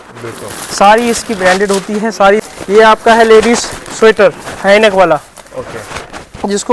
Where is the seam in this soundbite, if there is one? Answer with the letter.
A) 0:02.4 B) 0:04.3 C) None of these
A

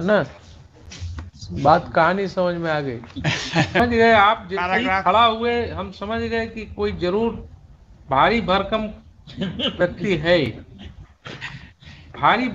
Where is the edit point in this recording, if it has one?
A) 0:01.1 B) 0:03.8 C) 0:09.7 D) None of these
B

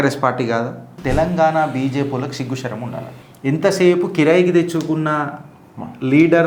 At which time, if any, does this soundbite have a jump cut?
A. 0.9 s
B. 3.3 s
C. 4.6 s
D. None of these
A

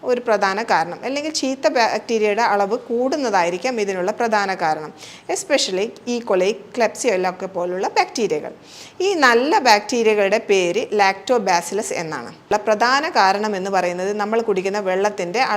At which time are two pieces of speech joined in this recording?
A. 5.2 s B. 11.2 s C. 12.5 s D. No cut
C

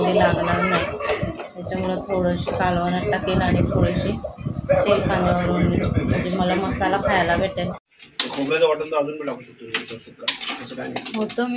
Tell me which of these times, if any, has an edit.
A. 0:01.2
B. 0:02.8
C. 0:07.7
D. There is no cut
C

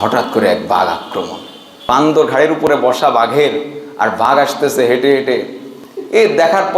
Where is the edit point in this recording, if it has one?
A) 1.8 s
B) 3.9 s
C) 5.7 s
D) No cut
A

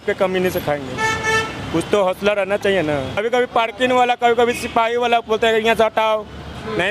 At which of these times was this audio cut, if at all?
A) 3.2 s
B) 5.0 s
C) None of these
A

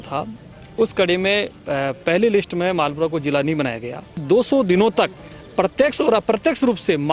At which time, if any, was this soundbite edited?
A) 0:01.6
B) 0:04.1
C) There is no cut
B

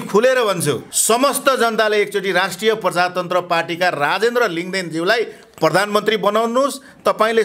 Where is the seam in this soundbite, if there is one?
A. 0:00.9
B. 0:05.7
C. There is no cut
A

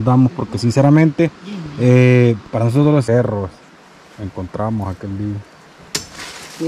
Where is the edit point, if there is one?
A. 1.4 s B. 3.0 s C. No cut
B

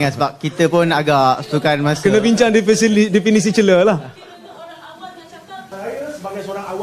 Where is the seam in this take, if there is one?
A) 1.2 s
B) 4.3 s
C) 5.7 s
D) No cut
C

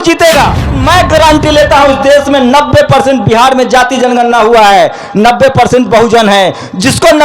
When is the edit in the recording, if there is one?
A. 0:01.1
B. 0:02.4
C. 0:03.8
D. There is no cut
A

